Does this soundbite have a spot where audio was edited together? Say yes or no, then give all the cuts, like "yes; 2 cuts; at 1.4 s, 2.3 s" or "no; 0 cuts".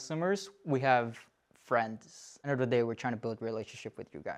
no; 0 cuts